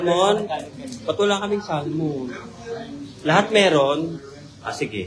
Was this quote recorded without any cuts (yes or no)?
yes